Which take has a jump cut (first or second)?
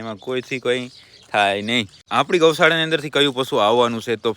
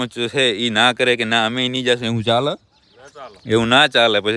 first